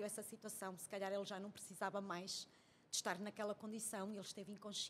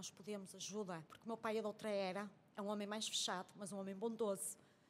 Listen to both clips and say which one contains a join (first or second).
second